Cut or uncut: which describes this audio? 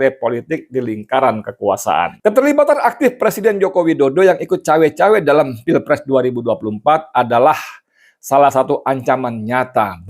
cut